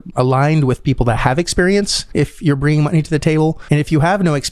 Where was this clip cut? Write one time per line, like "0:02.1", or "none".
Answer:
0:02.0
0:03.6

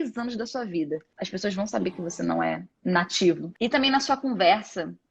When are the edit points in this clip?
0:01.1
0:02.7
0:03.5

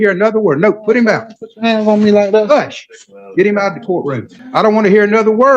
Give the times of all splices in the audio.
0:04.3

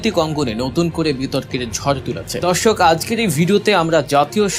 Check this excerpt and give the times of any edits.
0:02.3

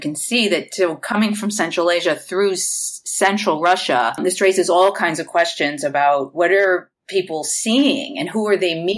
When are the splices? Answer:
none

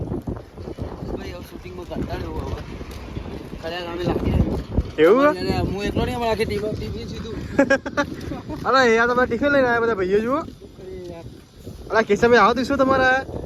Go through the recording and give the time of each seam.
none

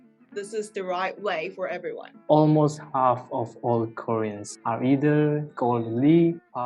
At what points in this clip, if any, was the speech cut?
0:02.2
0:04.5

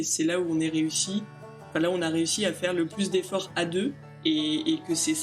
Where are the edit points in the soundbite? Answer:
0:04.1

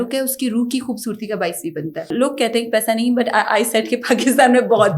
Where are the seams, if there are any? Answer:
0:02.1

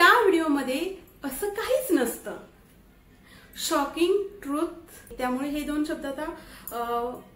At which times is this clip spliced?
0:05.1

